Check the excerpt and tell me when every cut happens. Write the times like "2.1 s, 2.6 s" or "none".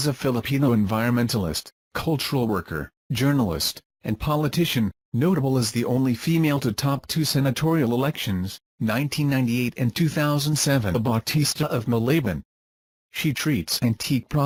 none

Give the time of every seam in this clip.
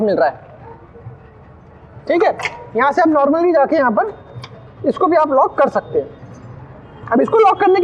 none

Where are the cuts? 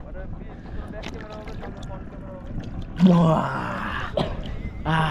none

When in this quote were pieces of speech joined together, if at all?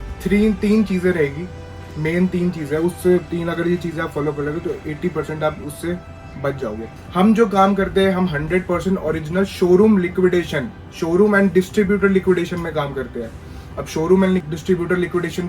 6.9 s, 14.4 s

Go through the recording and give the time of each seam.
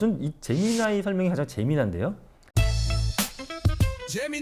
2.3 s

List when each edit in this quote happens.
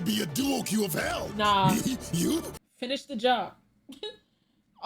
2.5 s

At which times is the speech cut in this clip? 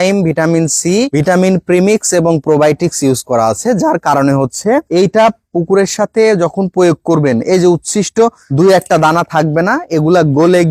none

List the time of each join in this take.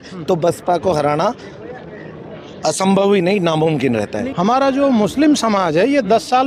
4.1 s

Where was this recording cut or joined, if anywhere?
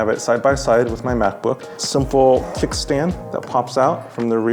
1.7 s

